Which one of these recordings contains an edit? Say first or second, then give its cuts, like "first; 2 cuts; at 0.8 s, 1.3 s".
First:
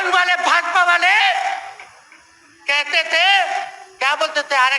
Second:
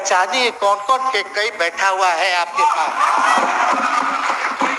second; 1 cut; at 3.3 s